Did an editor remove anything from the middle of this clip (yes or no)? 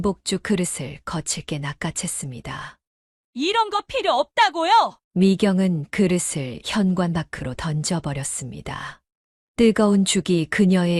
no